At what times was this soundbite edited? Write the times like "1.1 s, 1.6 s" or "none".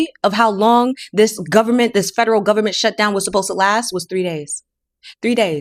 none